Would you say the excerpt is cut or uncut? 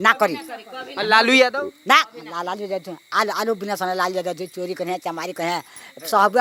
uncut